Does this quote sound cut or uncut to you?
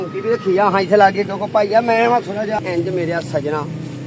cut